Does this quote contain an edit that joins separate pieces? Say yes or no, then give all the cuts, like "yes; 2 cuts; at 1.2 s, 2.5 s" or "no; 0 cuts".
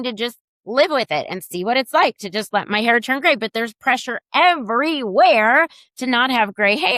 no; 0 cuts